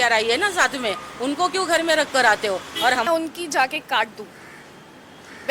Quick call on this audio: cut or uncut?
cut